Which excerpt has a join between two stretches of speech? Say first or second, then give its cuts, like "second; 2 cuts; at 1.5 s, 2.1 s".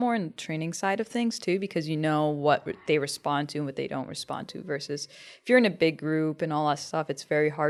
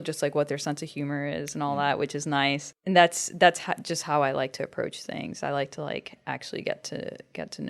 second; 1 cut; at 2.7 s